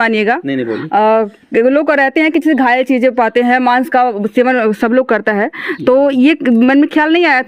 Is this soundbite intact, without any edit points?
yes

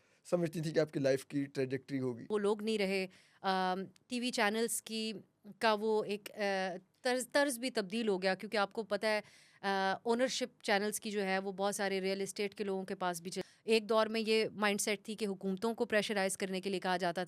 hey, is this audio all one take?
no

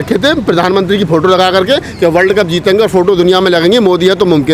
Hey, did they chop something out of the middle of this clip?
no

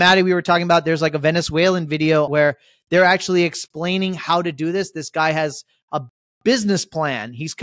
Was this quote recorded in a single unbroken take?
no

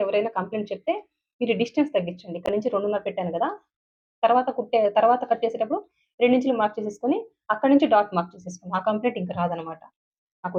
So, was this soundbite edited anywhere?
no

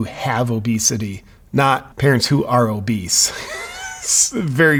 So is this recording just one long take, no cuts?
yes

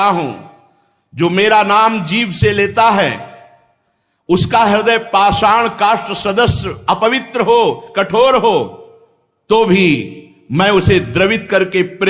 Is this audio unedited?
yes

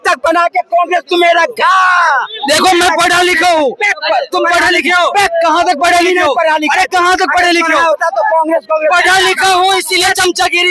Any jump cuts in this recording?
no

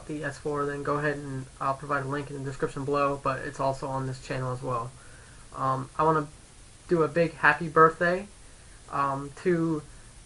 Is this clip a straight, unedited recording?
no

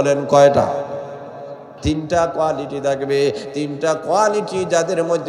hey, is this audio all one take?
no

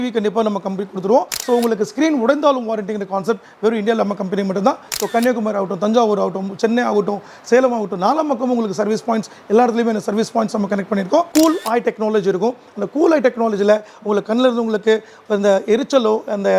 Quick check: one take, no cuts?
no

